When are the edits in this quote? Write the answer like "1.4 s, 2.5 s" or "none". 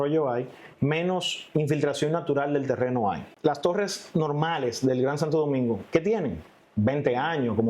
3.3 s

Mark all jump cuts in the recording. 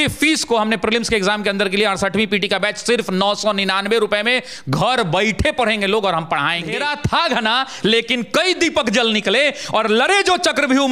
6.8 s

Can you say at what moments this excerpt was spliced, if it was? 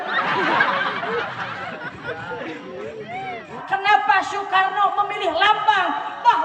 3.5 s

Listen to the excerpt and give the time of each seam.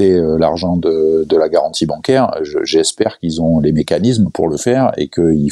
none

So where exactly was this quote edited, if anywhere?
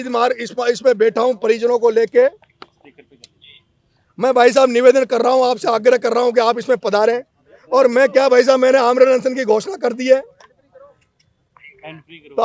none

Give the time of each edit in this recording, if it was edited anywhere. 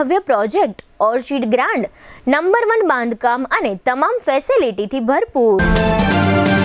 5.6 s

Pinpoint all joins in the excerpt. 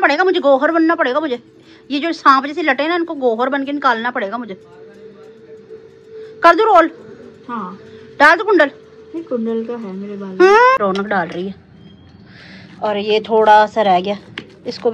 10.8 s

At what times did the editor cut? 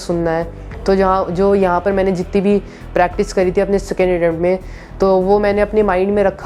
none

